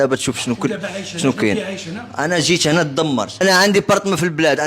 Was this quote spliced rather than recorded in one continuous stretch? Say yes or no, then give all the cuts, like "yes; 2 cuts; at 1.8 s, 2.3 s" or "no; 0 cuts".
yes; 1 cut; at 3.4 s